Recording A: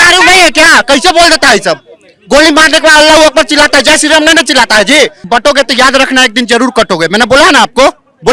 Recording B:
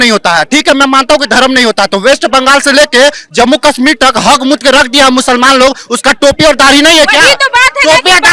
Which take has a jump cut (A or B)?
A